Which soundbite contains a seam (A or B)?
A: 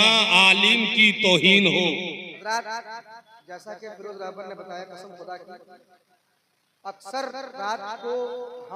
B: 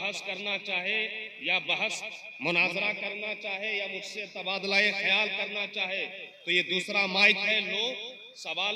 A